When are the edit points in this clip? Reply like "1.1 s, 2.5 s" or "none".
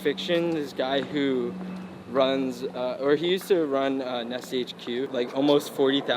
5.1 s